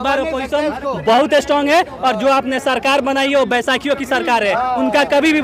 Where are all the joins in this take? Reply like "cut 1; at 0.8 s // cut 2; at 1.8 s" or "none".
none